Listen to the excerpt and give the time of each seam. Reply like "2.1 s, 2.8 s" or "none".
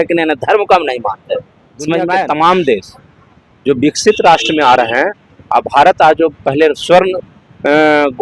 2.2 s

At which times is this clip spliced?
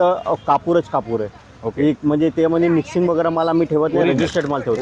none

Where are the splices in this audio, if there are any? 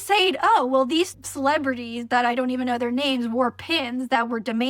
1.2 s

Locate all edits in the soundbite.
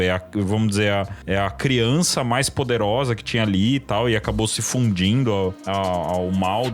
1.2 s, 5.6 s

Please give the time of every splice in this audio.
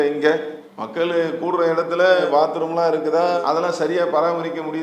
none

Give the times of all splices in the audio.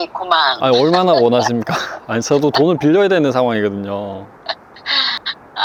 none

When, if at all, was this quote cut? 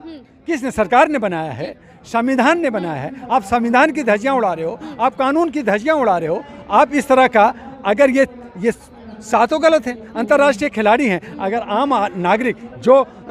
none

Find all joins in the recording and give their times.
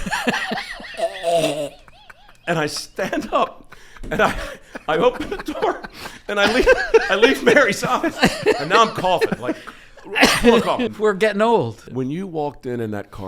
10.9 s, 11.9 s

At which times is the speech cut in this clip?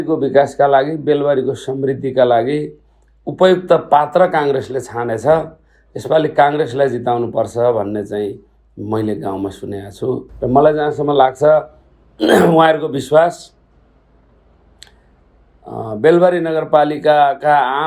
10.3 s

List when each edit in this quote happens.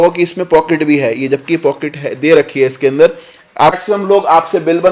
3.8 s

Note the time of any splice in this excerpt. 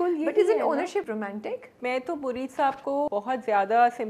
1.3 s, 3.1 s

